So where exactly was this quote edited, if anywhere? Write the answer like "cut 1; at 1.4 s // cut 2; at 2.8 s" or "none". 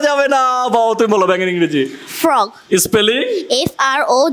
none